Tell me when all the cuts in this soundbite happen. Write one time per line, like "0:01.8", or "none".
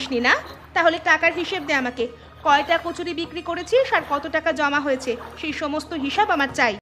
none